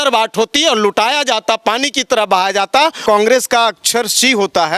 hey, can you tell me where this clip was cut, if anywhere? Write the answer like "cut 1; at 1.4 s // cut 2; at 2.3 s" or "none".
cut 1; at 3.0 s